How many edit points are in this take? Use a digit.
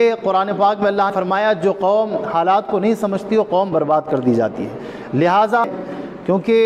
2